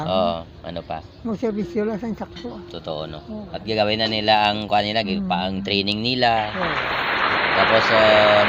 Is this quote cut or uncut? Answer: uncut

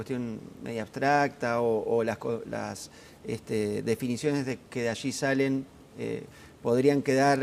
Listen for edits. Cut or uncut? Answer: uncut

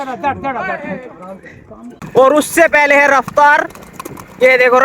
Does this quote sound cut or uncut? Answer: cut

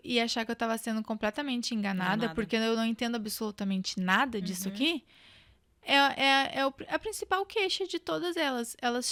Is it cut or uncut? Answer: uncut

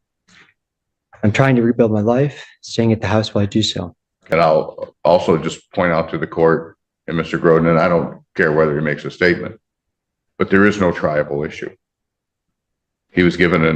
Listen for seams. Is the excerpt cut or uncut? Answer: cut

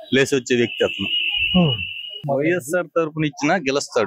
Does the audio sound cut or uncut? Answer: cut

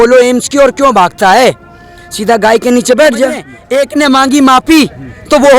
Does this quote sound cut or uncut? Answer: cut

